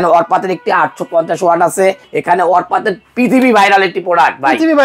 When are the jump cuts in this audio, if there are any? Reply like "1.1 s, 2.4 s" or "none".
2.1 s